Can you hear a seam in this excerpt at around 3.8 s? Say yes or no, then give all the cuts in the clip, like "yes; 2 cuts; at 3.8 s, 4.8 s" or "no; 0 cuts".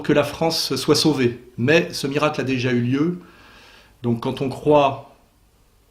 no; 0 cuts